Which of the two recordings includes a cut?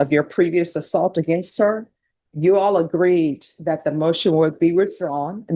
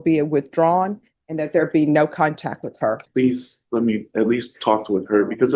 second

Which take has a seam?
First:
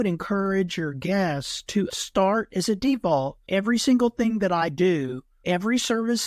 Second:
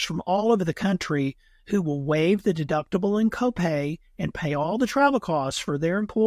first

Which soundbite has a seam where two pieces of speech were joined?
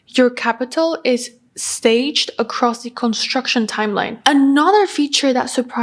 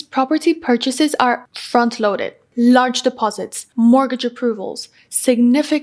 first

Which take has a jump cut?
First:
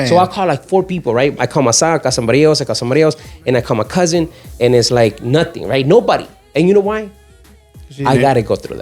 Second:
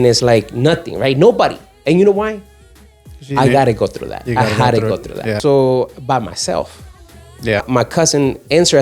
second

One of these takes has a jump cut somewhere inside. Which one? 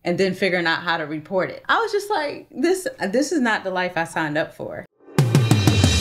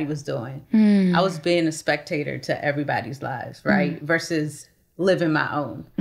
first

